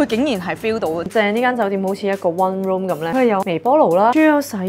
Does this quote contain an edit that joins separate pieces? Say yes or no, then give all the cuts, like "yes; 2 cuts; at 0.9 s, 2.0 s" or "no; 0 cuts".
yes; 1 cut; at 1.0 s